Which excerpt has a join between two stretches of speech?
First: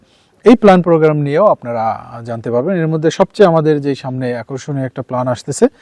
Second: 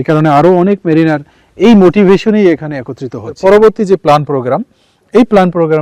second; 1 cut; at 3.4 s

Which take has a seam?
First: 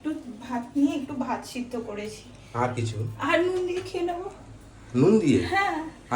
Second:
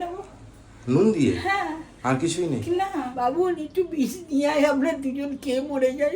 second; 1 cut; at 3.1 s

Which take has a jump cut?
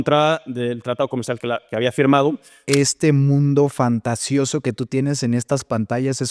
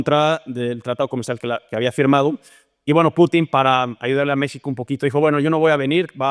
first; 1 cut; at 2.6 s

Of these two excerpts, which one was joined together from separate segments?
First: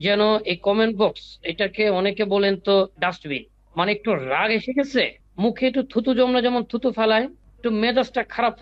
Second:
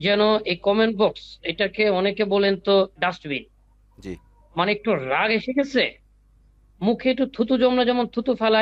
first; 3 cuts; at 3.6 s, 5.2 s, 7.4 s

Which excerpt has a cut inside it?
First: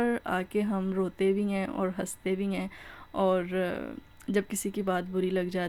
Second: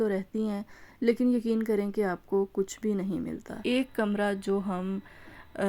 second; 1 cut; at 3.5 s

